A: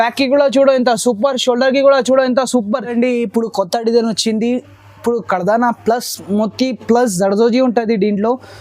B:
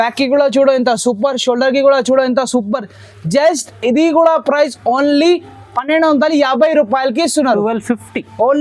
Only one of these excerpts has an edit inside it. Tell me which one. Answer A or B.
A